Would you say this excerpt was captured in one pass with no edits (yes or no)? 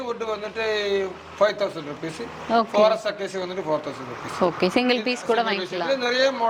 yes